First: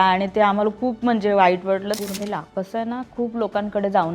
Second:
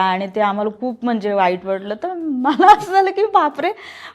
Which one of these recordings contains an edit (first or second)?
first